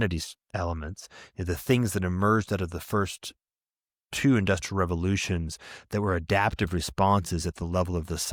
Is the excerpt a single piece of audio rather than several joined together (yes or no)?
yes